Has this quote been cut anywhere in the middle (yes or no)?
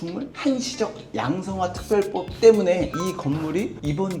yes